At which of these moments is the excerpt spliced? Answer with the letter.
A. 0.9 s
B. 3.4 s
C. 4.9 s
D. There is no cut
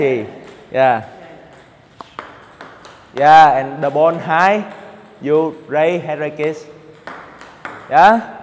B